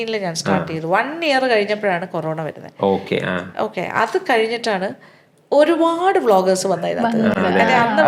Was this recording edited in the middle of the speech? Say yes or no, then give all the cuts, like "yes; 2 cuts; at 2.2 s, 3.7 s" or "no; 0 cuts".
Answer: no; 0 cuts